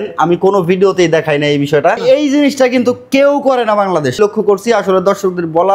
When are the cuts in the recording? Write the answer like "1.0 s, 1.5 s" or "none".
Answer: 2.0 s, 4.2 s